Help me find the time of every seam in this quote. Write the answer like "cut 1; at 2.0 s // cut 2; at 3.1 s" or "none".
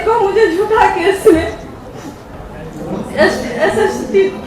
none